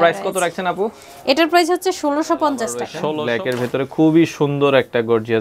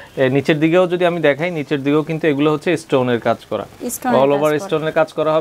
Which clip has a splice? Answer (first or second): first